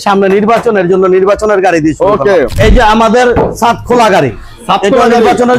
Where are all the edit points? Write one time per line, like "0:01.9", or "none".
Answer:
0:02.6